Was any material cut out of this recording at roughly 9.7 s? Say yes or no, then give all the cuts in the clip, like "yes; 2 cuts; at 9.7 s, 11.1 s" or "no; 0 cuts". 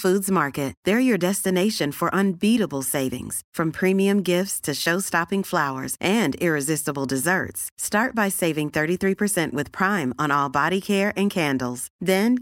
no; 0 cuts